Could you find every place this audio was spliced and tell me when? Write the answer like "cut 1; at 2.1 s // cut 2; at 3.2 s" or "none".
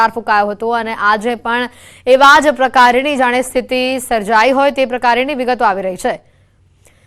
cut 1; at 2.7 s